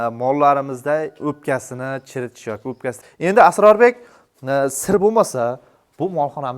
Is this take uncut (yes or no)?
no